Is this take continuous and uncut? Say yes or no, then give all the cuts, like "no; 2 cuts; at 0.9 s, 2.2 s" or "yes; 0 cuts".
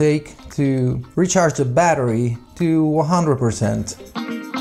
yes; 0 cuts